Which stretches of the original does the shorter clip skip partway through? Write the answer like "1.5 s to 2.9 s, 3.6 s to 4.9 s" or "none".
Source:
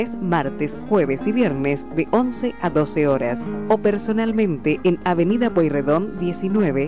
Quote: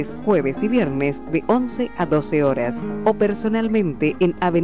none